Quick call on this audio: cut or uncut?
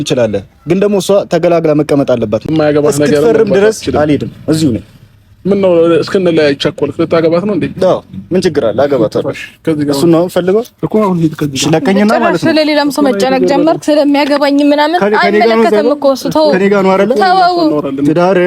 cut